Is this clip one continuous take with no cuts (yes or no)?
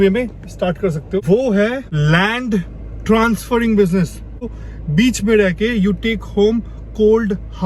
no